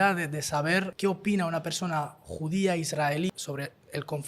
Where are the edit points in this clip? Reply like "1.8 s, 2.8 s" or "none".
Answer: 0.9 s, 3.3 s